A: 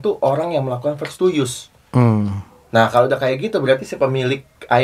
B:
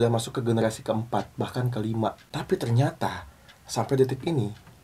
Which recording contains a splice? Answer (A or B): B